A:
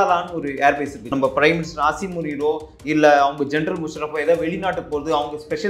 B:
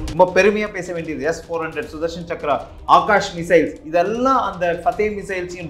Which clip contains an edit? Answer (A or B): A